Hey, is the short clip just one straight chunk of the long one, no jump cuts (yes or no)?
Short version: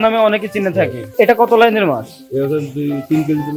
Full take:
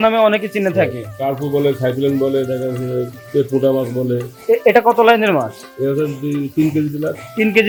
no